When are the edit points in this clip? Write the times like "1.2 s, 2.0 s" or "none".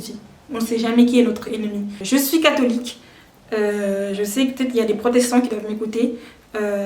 1.9 s